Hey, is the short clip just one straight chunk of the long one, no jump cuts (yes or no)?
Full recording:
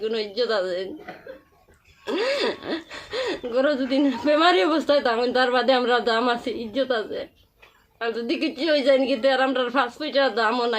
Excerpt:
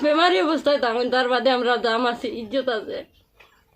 yes